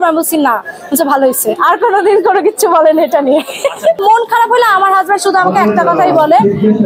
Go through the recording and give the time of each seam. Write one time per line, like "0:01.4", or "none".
0:04.0